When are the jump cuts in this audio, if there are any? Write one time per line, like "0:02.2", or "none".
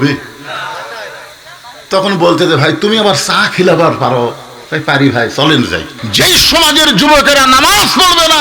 0:06.0